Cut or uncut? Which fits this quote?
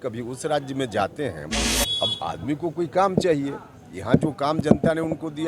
cut